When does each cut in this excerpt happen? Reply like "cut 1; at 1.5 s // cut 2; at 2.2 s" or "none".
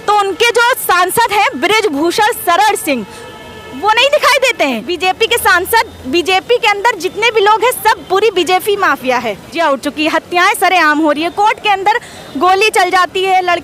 cut 1; at 4.9 s // cut 2; at 9.5 s // cut 3; at 10.2 s

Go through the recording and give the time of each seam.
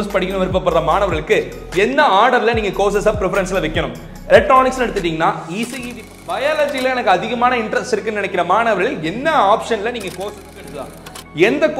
cut 1; at 5.8 s // cut 2; at 10.6 s

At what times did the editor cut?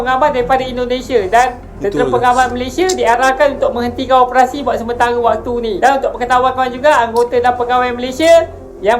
none

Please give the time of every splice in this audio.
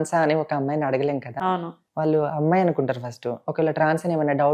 none

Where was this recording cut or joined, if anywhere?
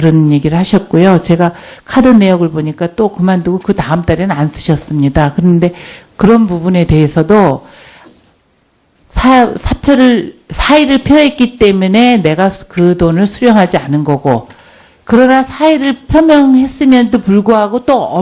none

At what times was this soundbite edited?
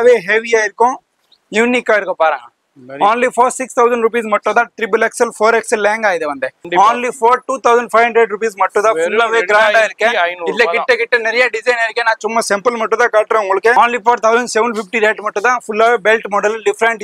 cut 1; at 6.6 s // cut 2; at 13.7 s

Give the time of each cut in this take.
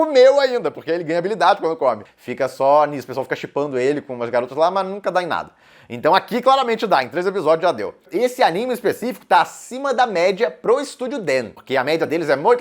cut 1; at 2.1 s // cut 2; at 7.9 s // cut 3; at 11.6 s

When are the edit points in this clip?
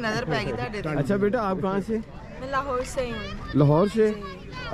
cut 1; at 1.0 s

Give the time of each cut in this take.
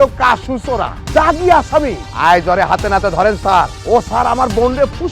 cut 1; at 0.9 s // cut 2; at 2.0 s // cut 3; at 3.8 s

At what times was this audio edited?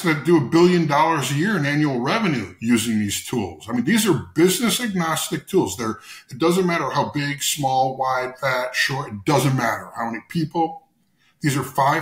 none

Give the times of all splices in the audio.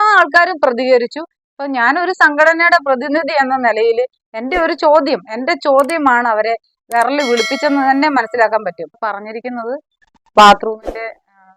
cut 1; at 8.9 s

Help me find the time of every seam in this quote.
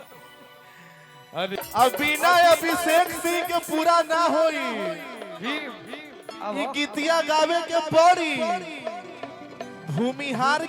cut 1; at 1.5 s

